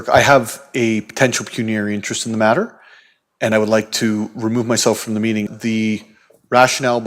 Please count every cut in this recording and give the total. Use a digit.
1